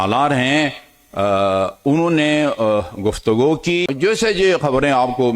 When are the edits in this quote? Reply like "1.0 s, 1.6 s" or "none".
3.9 s